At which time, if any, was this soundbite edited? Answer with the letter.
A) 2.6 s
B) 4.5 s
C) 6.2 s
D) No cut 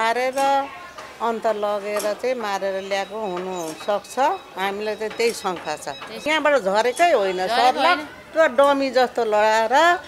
C